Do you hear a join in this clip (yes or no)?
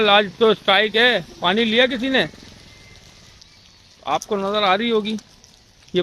yes